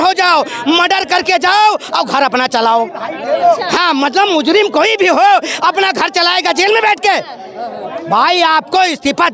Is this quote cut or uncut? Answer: uncut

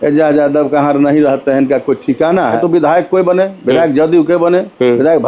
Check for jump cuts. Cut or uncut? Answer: cut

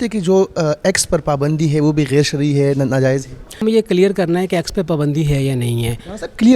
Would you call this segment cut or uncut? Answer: cut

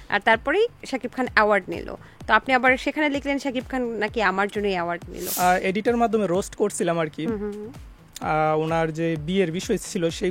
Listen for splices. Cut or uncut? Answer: cut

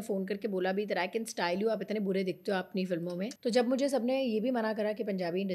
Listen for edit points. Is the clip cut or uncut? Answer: cut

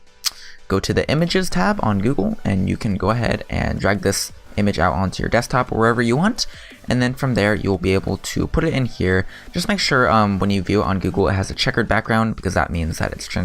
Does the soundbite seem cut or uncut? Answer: cut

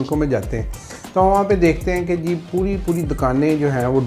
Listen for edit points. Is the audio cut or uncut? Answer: uncut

